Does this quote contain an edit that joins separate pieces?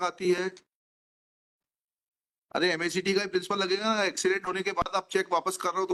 no; 0 cuts

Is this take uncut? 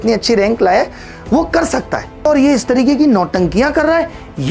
no; 1 cut; at 2.2 s

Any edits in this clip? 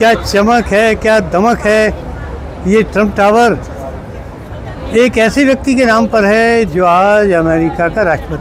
no; 0 cuts

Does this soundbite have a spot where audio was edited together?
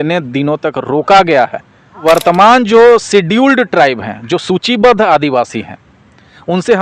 yes; 1 cut; at 2.0 s

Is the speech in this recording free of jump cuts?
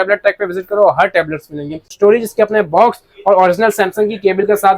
no; 1 cut; at 1.9 s

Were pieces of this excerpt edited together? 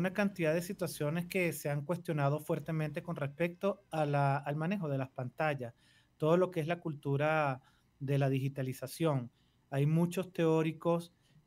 no; 0 cuts

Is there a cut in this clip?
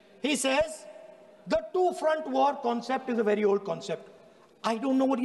no; 0 cuts

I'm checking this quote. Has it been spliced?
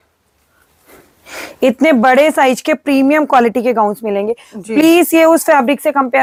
no; 0 cuts

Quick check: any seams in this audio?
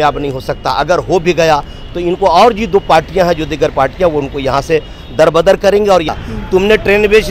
yes; 1 cut; at 6.1 s

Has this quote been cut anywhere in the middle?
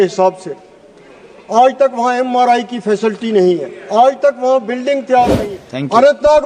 yes; 1 cut; at 5.4 s

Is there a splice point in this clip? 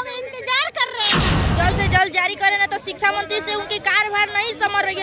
yes; 1 cut; at 1.4 s

